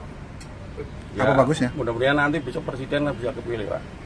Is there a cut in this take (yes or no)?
no